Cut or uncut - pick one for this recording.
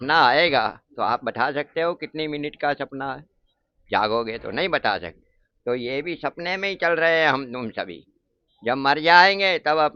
uncut